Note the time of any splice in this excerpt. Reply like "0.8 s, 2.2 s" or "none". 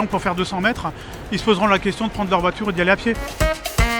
none